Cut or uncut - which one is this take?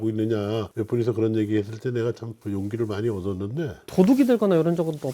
cut